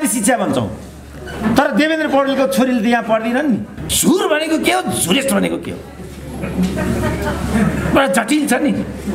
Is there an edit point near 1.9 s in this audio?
no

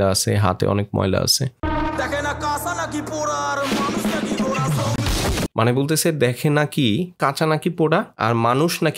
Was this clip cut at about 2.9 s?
no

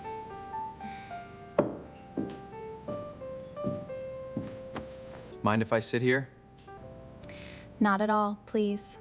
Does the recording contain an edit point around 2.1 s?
no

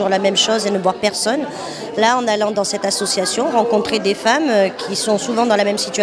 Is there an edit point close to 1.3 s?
yes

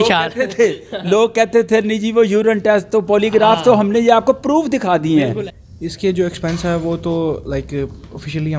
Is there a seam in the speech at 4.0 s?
no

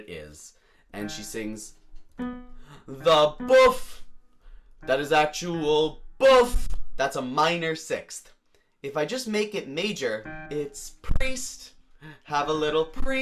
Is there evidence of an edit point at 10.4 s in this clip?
yes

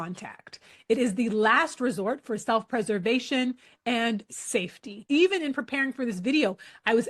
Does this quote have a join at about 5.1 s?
yes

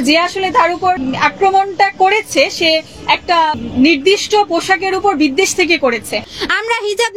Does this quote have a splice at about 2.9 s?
no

